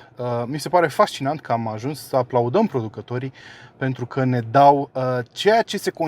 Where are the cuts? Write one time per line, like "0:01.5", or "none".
none